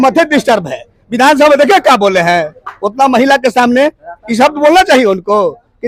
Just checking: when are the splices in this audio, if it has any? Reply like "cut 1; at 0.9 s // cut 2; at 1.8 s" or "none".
none